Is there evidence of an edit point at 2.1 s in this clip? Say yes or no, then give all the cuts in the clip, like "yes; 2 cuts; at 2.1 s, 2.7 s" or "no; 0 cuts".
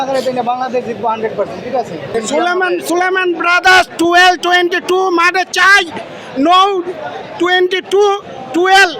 yes; 1 cut; at 2.1 s